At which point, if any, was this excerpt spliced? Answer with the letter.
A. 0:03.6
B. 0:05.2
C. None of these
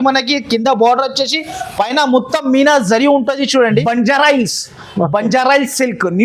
A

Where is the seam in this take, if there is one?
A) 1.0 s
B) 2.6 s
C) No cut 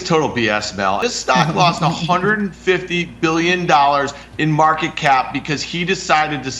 A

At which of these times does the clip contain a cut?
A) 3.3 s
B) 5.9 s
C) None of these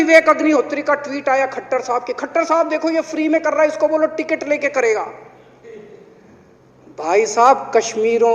C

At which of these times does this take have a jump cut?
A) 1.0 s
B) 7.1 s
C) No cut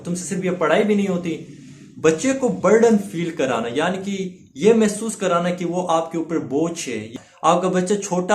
B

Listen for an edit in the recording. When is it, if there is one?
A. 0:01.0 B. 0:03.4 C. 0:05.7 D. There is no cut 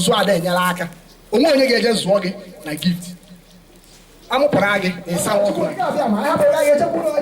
C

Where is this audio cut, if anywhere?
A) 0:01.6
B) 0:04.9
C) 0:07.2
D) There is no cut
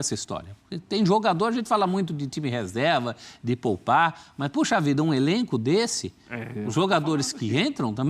D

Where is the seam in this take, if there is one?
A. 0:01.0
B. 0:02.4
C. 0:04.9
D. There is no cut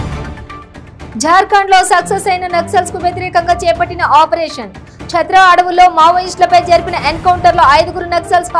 A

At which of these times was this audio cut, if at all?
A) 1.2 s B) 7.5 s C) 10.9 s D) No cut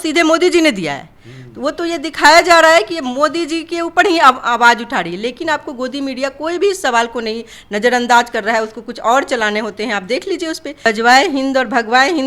C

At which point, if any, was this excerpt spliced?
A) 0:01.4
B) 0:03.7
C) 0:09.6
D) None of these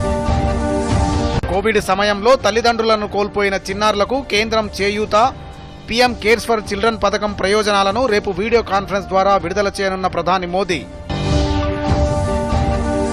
A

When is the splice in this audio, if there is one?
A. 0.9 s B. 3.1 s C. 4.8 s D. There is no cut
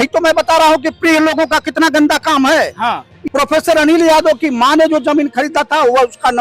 B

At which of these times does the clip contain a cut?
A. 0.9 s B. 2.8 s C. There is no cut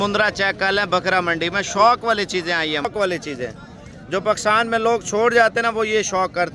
B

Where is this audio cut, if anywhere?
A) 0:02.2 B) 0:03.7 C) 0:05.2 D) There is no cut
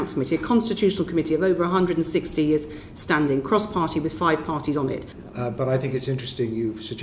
C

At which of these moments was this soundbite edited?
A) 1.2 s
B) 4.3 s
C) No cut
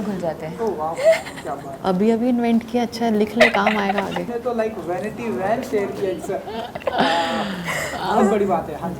B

